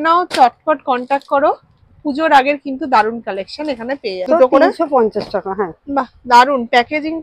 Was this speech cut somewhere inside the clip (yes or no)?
yes